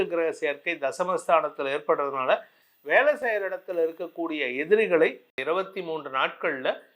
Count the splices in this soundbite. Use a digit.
1